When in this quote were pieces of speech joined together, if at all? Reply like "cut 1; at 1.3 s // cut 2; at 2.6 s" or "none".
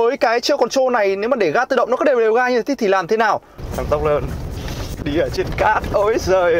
cut 1; at 3.6 s

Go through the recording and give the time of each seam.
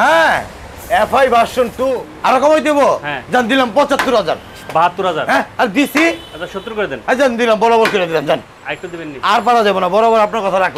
cut 1; at 2.1 s

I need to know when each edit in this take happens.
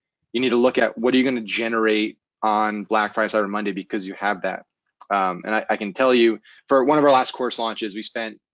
cut 1; at 6.5 s

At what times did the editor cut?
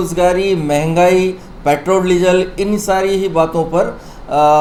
none

